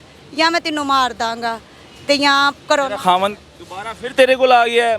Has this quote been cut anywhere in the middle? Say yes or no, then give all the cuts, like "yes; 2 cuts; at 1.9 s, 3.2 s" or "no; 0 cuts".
no; 0 cuts